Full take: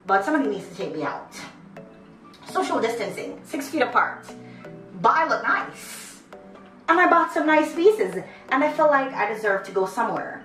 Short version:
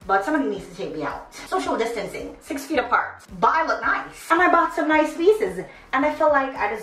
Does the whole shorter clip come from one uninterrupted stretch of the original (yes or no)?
no